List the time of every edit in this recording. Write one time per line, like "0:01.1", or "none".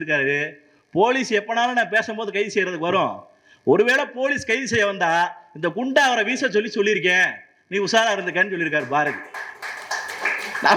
none